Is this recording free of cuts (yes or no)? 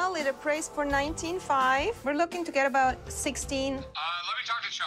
no